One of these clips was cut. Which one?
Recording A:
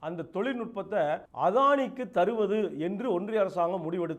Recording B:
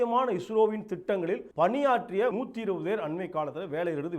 B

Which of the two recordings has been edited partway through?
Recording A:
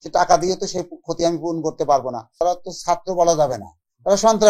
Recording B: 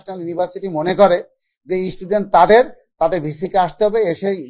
A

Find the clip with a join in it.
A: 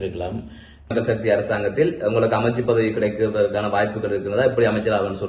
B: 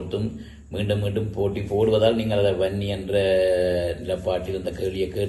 A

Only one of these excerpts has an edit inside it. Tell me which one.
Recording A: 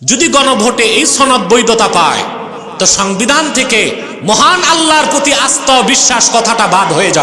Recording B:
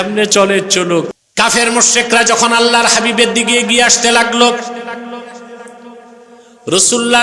B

